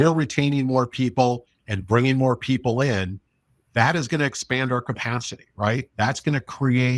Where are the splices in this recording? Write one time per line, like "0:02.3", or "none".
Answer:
none

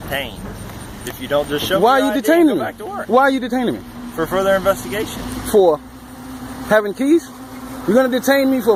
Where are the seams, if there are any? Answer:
none

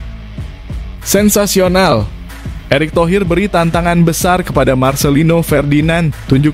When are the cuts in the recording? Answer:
0:01.1

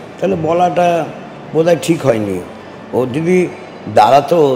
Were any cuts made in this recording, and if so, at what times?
none

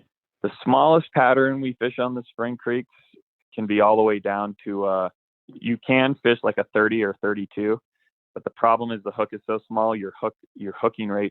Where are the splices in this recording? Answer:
0:05.4

